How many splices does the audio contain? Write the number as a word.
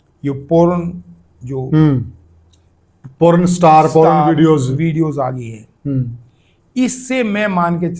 zero